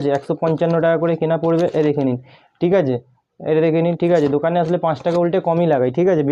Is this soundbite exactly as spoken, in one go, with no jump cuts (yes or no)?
yes